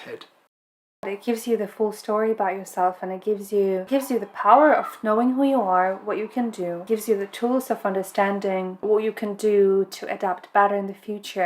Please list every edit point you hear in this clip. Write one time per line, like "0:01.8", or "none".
0:01.1
0:03.8
0:06.8
0:08.8